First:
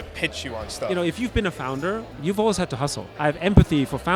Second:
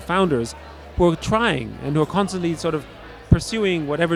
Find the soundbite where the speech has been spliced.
first; 3 cuts; at 0.9 s, 2.1 s, 3.1 s

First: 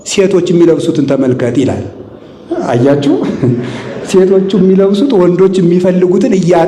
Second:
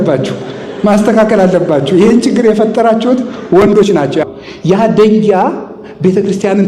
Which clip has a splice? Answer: second; 1 cut; at 4.2 s

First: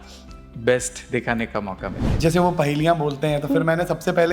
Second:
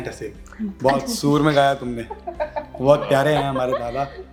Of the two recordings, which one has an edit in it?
first; 1 cut; at 2.0 s

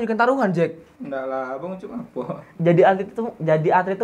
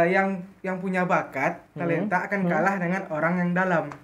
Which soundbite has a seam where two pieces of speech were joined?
first; 1 cut; at 2.5 s

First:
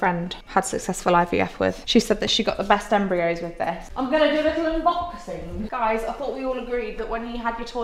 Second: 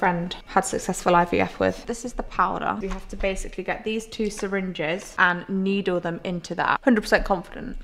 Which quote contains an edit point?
second; 2 cuts; at 1.8 s, 6.8 s

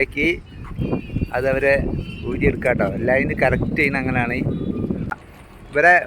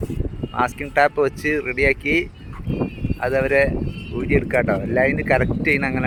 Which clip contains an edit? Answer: first; 1 cut; at 5.2 s

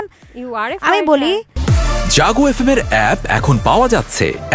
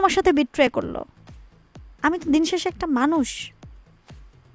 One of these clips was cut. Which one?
first; 1 cut; at 1.5 s

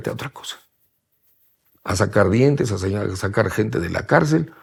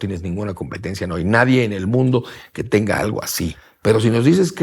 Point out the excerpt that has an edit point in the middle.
second; 1 cut; at 3.7 s

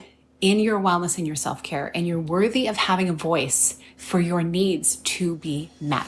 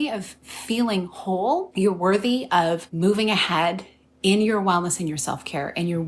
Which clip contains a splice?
second; 2 cuts; at 1.7 s, 2.9 s

